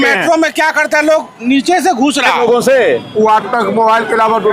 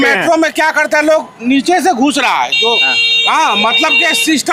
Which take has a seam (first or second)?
first